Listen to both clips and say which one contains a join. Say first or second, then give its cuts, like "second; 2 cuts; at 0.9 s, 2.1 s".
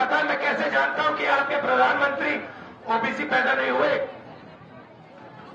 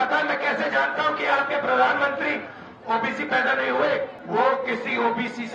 second; 1 cut; at 4.2 s